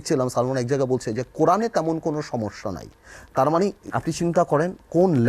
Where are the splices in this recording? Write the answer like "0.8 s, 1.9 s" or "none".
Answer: 3.8 s